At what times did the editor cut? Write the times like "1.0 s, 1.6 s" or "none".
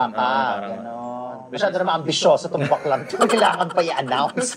1.5 s